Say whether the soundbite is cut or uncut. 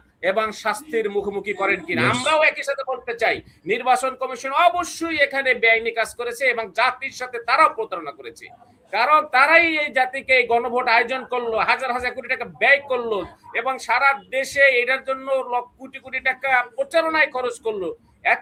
uncut